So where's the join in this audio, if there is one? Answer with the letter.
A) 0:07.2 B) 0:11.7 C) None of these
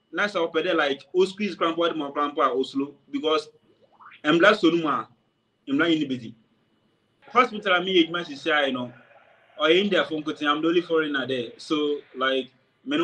A